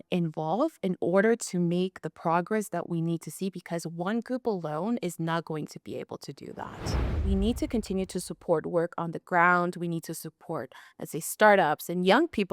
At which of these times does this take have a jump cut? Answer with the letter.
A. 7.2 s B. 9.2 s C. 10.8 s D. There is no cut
A